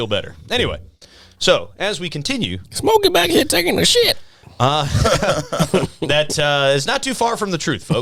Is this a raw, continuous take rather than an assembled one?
yes; 0 cuts

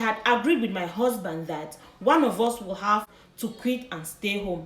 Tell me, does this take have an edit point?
yes; 1 cut; at 3.2 s

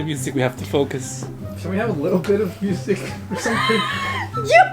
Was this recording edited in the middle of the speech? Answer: yes; 1 cut; at 1.2 s

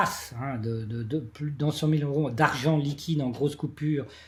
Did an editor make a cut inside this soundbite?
no; 0 cuts

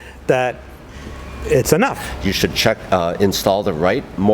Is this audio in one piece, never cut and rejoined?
no; 1 cut; at 2.1 s

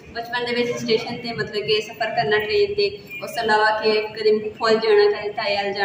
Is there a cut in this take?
no; 0 cuts

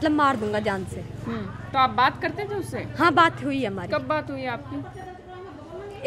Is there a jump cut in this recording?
no; 0 cuts

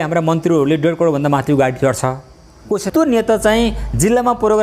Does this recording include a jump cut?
yes; 1 cut; at 2.9 s

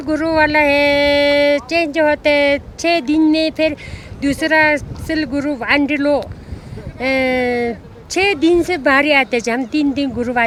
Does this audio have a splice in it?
no; 0 cuts

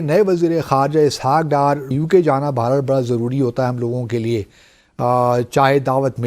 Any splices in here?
yes; 1 cut; at 1.9 s

